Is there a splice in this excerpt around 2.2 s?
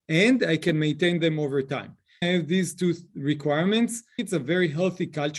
yes; 2 cuts; at 2.2 s, 4.2 s

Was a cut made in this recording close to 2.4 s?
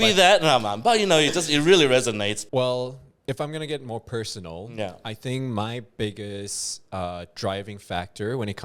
yes; 1 cut; at 2.4 s

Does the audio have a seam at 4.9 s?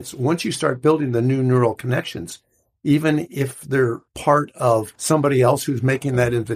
yes; 1 cut; at 4.9 s

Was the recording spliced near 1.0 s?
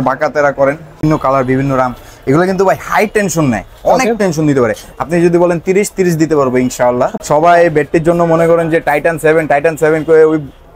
yes; 2 cuts; at 1.0 s, 7.2 s

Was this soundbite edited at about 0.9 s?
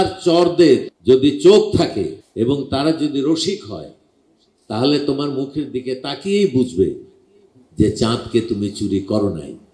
yes; 2 cuts; at 0.9 s, 2.2 s

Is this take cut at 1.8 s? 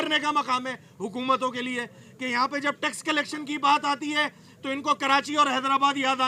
no; 0 cuts

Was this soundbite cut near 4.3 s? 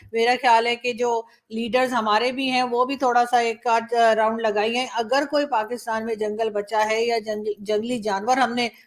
no; 0 cuts

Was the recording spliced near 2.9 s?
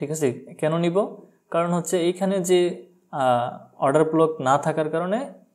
no; 0 cuts

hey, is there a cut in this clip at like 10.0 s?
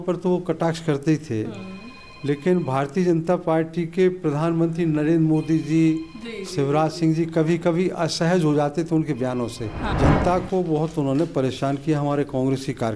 yes; 1 cut; at 10.0 s

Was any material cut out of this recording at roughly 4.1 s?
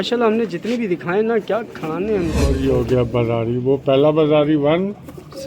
no; 1 cut; at 2.6 s

